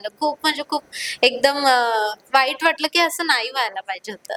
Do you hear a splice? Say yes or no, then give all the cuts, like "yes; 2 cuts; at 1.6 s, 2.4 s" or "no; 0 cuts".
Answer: no; 0 cuts